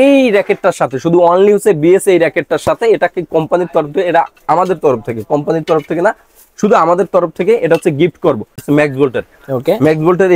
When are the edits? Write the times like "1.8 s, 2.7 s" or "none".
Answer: 8.6 s